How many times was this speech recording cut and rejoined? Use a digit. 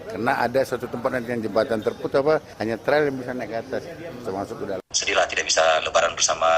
1